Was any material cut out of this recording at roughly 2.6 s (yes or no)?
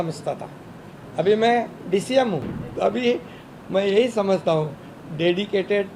yes